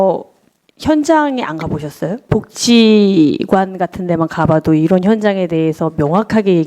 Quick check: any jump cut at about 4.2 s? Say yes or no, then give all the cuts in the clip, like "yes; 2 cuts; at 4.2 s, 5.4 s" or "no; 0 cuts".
no; 1 cut; at 2.3 s